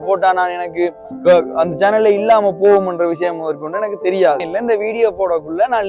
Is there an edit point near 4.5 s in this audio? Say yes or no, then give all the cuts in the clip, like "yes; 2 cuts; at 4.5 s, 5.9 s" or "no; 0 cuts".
yes; 1 cut; at 4.5 s